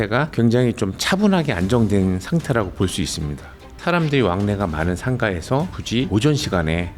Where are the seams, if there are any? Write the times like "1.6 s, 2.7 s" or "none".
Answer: 3.8 s